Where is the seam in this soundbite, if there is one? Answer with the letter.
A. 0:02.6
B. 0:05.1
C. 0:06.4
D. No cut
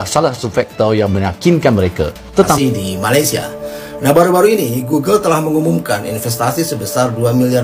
A